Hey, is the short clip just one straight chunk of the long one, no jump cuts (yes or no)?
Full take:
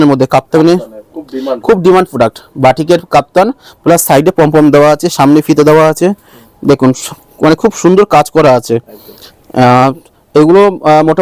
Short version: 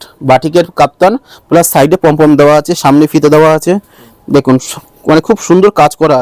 yes